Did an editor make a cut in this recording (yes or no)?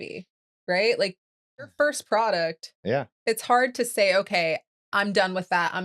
yes